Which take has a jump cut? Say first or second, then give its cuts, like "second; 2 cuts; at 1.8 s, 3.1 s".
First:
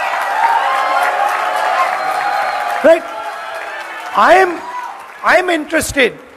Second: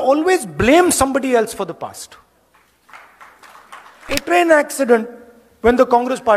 second; 1 cut; at 4.2 s